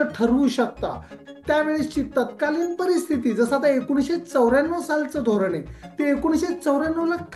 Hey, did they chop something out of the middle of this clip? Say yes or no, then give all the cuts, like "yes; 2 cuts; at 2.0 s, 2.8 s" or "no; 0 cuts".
yes; 1 cut; at 1.1 s